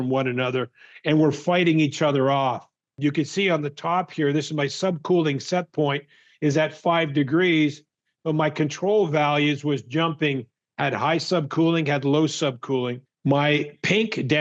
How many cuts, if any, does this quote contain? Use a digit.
1